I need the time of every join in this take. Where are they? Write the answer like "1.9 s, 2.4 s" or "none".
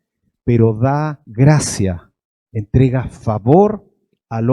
1.2 s